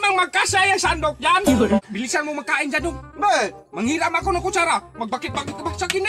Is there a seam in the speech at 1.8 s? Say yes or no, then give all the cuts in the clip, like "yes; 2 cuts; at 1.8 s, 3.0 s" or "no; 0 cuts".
yes; 1 cut; at 1.8 s